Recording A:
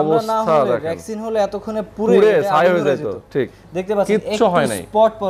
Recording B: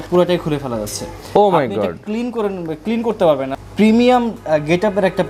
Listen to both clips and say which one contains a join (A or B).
B